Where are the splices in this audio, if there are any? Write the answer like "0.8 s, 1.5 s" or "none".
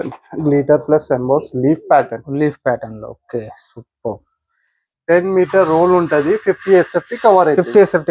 4.8 s